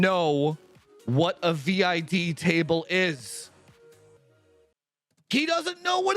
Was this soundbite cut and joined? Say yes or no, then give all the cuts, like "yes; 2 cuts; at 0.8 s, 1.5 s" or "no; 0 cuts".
yes; 1 cut; at 4.8 s